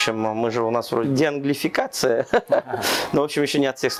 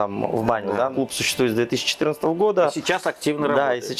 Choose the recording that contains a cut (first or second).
second